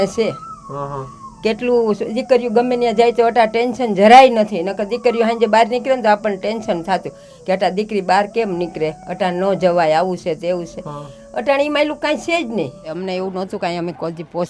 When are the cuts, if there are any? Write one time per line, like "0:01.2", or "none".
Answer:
0:12.9